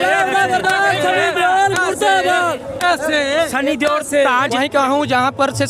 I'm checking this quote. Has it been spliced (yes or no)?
yes